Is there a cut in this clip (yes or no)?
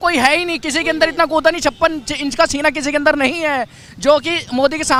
no